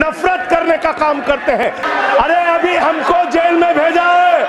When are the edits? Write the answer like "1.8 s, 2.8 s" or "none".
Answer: 1.8 s